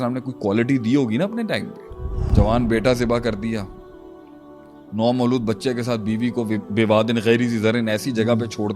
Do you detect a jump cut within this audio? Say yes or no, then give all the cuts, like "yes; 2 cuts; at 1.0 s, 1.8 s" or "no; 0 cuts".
yes; 1 cut; at 2.2 s